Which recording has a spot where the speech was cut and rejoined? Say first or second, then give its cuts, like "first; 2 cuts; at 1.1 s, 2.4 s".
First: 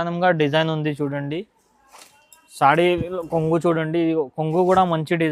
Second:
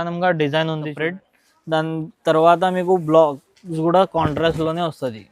second; 1 cut; at 0.9 s